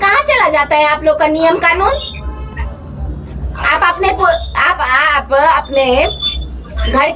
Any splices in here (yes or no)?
no